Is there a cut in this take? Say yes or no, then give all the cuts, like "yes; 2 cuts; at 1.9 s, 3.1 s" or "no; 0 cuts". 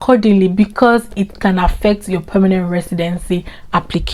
no; 0 cuts